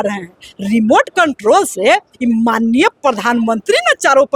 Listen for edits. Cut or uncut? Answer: uncut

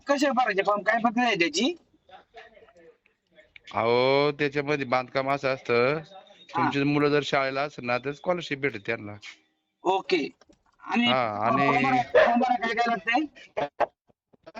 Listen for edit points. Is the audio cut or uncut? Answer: uncut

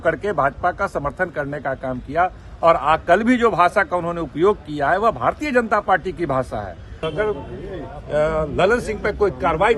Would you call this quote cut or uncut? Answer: cut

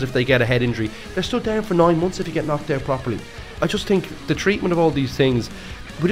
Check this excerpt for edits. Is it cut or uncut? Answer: cut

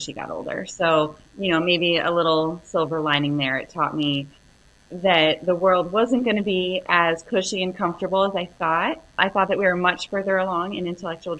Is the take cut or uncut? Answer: uncut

